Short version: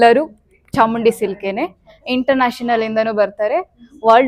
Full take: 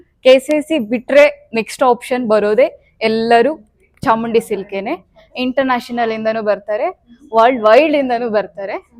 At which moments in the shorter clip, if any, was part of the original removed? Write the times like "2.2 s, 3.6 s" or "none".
none